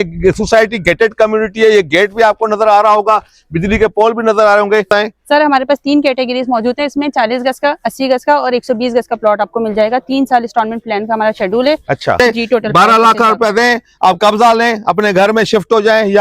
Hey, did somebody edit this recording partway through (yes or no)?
yes